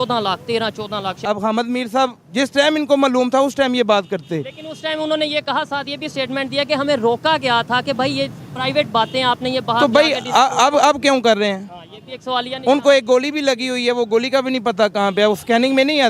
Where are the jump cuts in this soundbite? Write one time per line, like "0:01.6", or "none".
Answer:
0:01.2

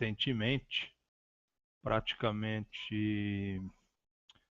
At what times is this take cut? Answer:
0:02.7

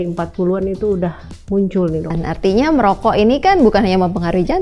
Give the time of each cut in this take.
0:02.1

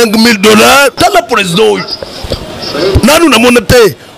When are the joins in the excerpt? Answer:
0:01.0

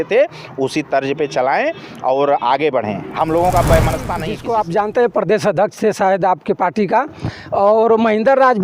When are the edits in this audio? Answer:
0:04.3

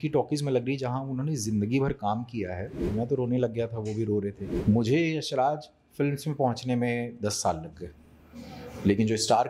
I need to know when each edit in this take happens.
0:02.9
0:04.5

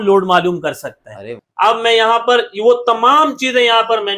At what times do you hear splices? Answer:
0:01.4

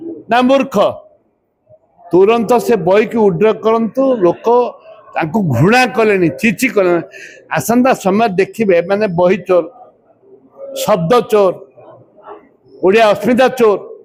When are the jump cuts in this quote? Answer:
none

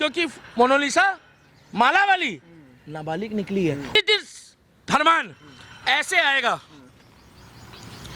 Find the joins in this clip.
0:03.9

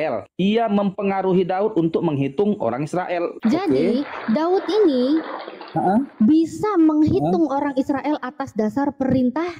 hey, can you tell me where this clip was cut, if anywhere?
0:03.3

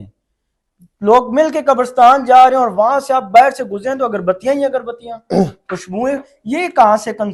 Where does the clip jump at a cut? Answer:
none

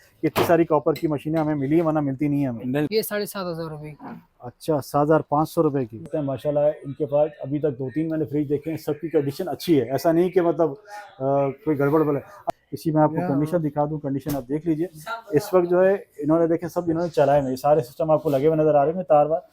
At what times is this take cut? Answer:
0:02.9
0:06.1
0:12.4

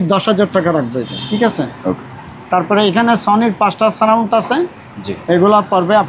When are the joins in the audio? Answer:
0:01.1

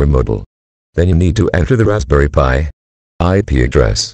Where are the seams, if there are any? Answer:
none

